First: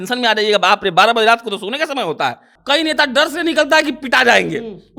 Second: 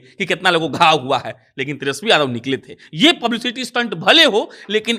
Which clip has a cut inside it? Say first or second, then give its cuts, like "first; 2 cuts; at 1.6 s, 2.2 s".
first; 1 cut; at 2.5 s